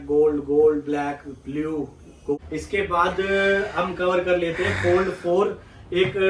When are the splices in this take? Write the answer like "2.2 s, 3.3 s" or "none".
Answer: 2.4 s